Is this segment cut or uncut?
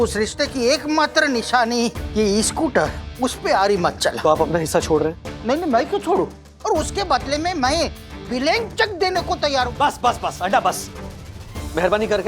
cut